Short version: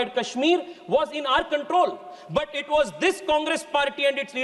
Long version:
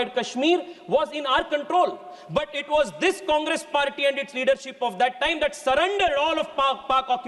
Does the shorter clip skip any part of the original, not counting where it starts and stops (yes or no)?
no